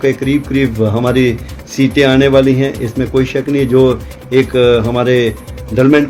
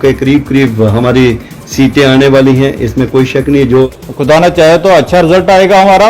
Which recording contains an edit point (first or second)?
second